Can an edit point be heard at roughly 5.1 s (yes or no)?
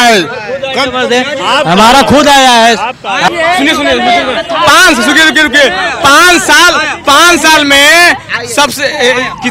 no